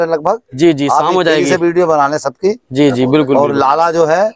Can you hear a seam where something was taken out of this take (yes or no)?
no